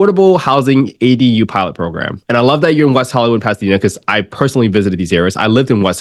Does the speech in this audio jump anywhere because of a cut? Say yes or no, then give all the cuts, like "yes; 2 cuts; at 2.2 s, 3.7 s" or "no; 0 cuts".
no; 0 cuts